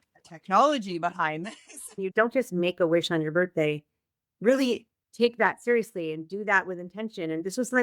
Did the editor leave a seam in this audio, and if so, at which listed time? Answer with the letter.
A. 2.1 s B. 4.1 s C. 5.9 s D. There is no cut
A